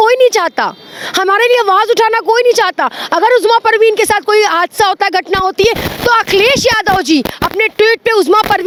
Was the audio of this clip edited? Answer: no; 0 cuts

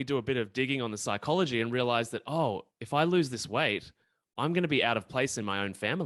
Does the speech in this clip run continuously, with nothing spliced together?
yes; 0 cuts

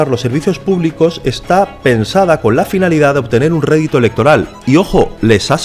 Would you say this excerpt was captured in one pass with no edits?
yes; 0 cuts

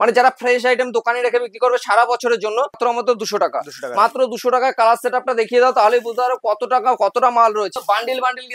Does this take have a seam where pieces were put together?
yes; 2 cuts; at 2.8 s, 7.7 s

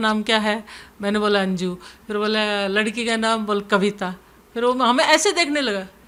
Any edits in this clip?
no; 0 cuts

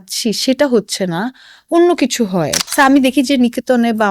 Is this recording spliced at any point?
yes; 1 cut; at 2.6 s

